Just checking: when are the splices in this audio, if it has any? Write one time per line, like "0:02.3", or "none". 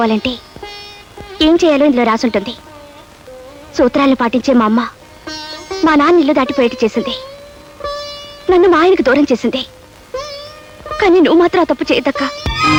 none